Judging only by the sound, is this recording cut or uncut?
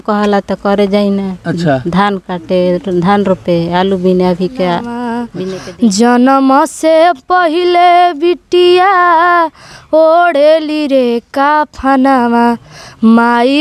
cut